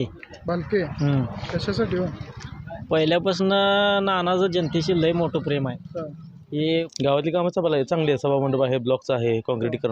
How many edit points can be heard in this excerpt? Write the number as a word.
one